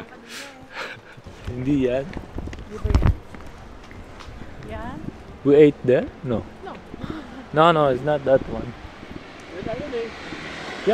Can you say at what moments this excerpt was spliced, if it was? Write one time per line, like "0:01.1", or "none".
0:01.3